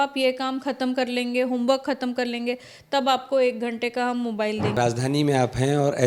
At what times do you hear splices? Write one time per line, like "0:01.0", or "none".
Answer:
0:04.8